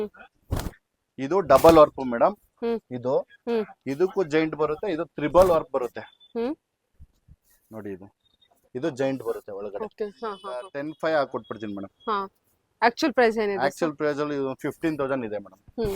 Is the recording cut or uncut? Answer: cut